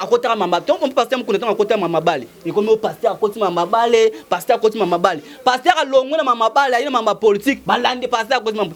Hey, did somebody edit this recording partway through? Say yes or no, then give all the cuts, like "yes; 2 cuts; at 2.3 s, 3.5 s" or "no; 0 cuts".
no; 0 cuts